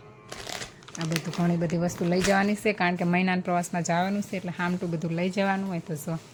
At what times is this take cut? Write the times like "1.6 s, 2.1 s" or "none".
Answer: none